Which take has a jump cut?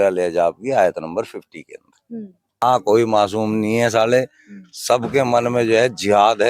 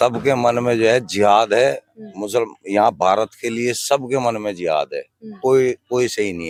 first; 1 cut; at 2.6 s

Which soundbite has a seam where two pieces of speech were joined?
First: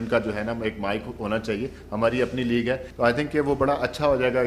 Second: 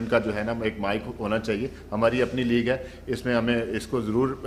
first; 1 cut; at 2.9 s

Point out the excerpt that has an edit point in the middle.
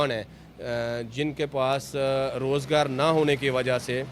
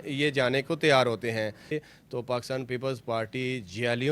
second; 1 cut; at 1.7 s

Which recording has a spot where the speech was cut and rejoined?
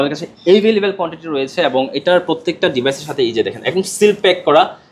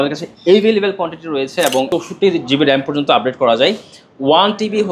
second; 1 cut; at 1.9 s

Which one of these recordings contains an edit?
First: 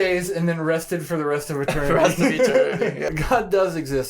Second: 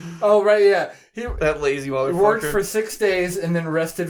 first; 1 cut; at 3.1 s

